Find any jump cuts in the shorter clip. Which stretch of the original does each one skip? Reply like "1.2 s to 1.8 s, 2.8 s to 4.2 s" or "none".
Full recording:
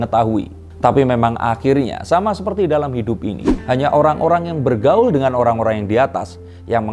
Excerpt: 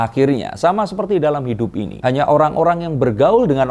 3.4 s to 3.6 s